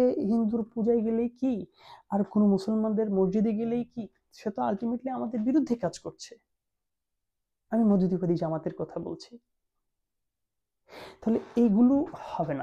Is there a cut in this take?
no; 0 cuts

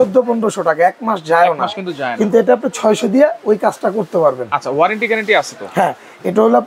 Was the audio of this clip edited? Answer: no; 0 cuts

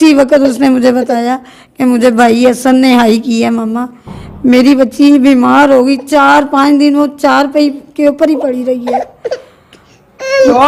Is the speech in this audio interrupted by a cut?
no; 0 cuts

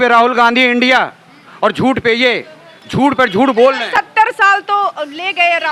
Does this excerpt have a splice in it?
no; 0 cuts

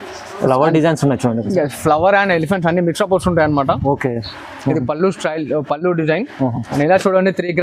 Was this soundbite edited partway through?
yes; 1 cut; at 6.6 s

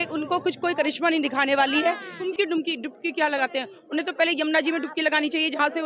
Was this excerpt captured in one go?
no; 1 cut; at 2.1 s

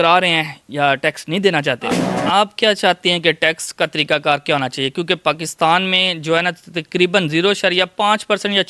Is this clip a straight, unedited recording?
no; 1 cut; at 2.0 s

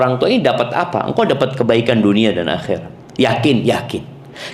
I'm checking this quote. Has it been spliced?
yes; 1 cut; at 3.0 s

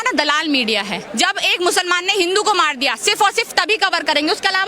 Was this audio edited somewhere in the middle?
yes; 1 cut; at 1.0 s

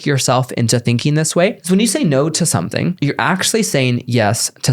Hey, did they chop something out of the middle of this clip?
yes; 2 cuts; at 1.6 s, 3.0 s

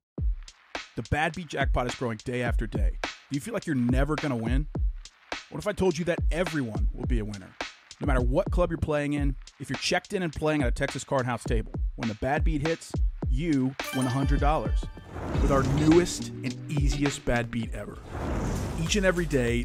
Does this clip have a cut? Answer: no; 0 cuts

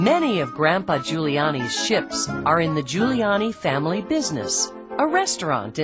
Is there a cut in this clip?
no; 0 cuts

